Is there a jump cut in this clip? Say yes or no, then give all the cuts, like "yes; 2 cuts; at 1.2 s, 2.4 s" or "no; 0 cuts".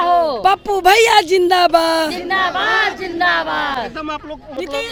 no; 0 cuts